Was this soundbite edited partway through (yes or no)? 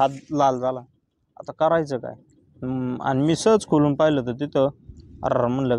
no